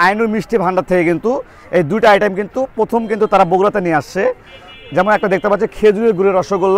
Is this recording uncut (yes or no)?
yes